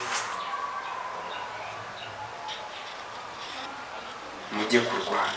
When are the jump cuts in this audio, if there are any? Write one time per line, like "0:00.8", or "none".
none